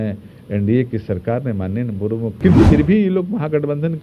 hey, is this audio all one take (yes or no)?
no